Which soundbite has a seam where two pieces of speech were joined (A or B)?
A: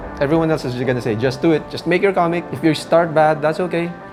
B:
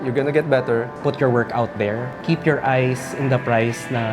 B